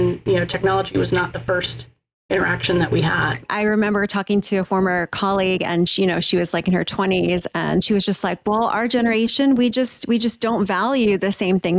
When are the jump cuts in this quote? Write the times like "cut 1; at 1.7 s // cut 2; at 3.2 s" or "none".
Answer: cut 1; at 3.5 s